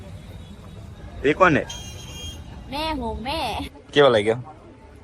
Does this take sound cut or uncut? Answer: cut